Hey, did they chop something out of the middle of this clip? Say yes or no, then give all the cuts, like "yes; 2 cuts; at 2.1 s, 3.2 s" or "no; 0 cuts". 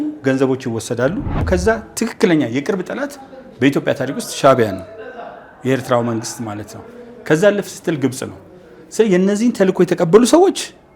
yes; 1 cut; at 1.4 s